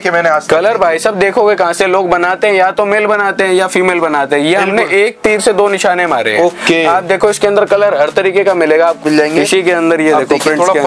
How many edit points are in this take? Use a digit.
1